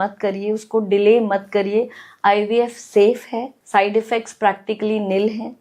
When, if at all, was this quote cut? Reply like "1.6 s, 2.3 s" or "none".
3.6 s

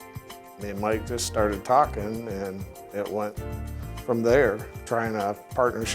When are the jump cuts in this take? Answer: 4.7 s

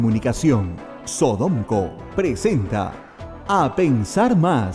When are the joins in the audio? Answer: none

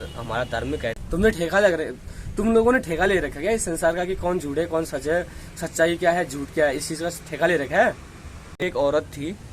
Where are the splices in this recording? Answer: 1.0 s, 8.5 s

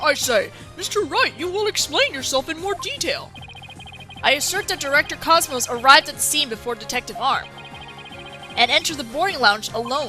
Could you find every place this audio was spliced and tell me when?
9.0 s

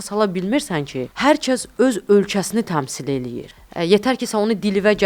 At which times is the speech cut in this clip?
1.0 s, 3.4 s

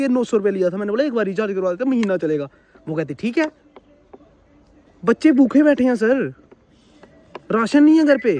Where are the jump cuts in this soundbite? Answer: none

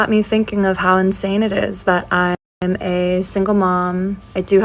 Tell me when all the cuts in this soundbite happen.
2.5 s

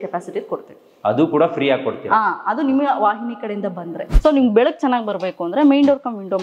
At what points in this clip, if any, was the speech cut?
4.1 s

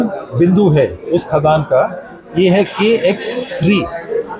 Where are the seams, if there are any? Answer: none

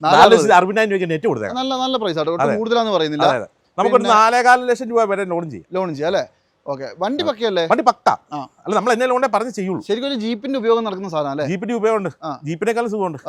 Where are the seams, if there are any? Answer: none

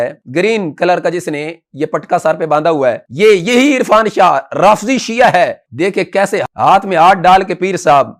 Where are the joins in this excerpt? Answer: none

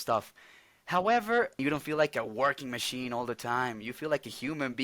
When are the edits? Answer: 1.5 s

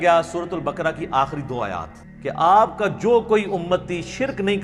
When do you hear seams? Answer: 2.0 s

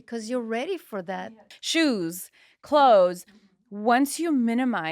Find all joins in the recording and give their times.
1.2 s

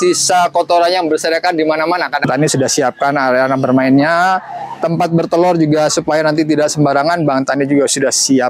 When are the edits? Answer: 2.2 s

